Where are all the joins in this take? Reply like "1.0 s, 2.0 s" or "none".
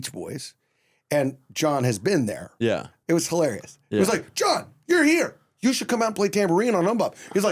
2.9 s